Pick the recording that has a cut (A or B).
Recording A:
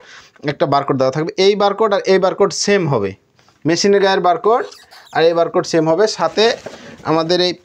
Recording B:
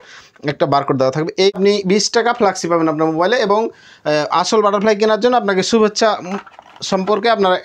B